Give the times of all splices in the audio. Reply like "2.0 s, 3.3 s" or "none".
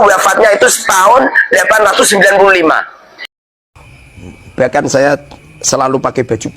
3.6 s